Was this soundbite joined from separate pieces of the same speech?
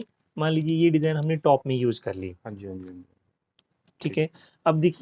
no; 0 cuts

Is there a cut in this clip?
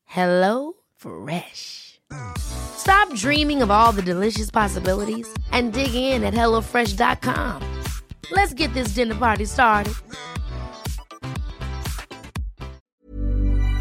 yes; 1 cut; at 12.9 s

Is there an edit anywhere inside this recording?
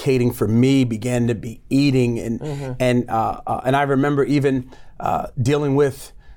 no; 0 cuts

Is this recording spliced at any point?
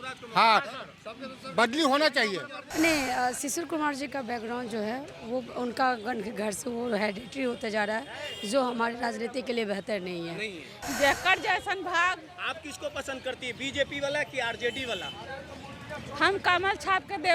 yes; 2 cuts; at 2.6 s, 10.7 s

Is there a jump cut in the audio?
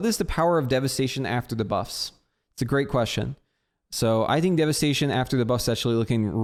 no; 0 cuts

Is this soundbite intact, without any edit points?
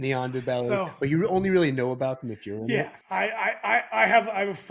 no; 1 cut; at 2.6 s

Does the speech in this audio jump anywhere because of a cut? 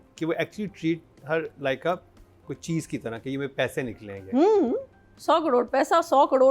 yes; 1 cut; at 5.1 s

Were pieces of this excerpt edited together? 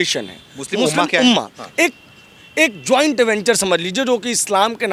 no; 0 cuts

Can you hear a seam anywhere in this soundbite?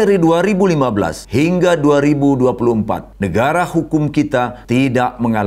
yes; 3 cuts; at 1.2 s, 3.1 s, 4.6 s

